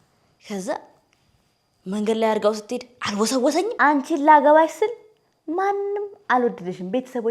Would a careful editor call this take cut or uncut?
cut